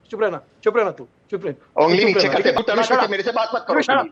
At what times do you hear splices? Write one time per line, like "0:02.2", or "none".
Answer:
0:02.6